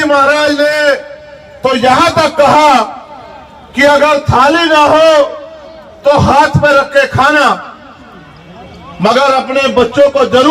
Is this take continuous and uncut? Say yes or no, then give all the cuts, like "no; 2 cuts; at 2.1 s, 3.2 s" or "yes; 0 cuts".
yes; 0 cuts